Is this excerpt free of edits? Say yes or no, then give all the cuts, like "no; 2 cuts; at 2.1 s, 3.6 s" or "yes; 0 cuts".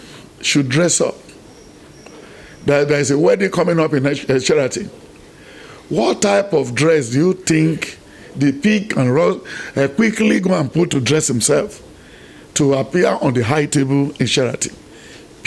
yes; 0 cuts